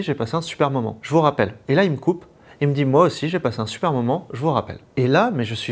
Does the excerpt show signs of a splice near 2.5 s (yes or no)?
no